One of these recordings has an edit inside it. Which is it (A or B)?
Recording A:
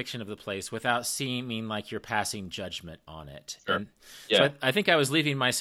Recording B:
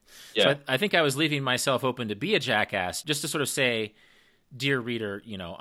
B